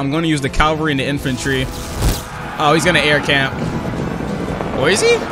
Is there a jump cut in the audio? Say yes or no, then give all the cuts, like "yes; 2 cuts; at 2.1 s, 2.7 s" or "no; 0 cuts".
no; 0 cuts